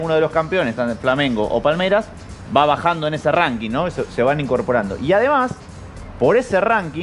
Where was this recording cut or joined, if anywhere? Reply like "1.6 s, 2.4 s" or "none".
none